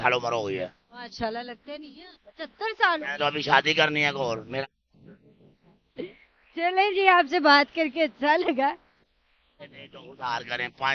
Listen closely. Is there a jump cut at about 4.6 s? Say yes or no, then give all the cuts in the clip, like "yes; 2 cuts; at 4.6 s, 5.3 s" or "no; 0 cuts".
yes; 1 cut; at 4.6 s